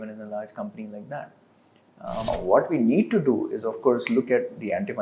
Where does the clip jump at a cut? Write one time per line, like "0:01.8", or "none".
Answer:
0:02.3